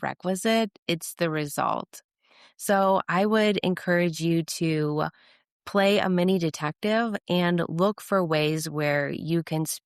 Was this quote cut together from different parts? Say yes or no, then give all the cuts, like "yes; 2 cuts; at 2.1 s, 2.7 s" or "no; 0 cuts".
no; 0 cuts